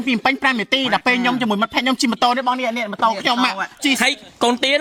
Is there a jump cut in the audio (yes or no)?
no